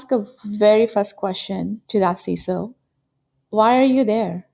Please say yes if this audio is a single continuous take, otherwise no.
no